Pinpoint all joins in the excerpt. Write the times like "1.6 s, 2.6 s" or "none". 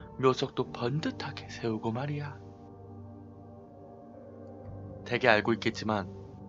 4.0 s